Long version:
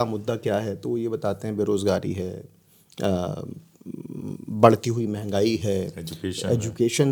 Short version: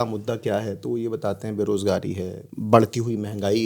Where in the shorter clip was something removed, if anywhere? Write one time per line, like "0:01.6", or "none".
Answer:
0:02.5